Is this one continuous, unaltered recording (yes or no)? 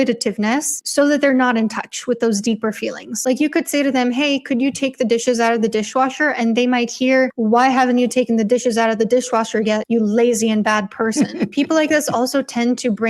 no